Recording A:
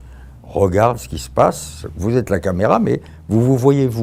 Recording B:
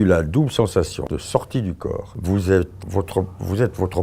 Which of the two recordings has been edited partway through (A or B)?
B